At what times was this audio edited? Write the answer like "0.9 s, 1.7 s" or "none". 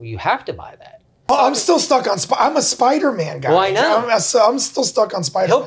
1.3 s